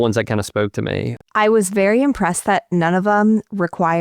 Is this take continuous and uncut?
no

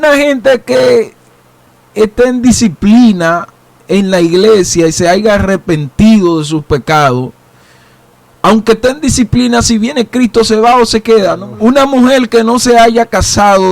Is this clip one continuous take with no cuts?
no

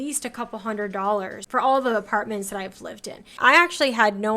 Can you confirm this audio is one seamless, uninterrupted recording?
no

